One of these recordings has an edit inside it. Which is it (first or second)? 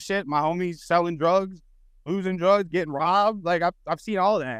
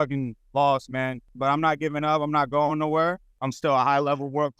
second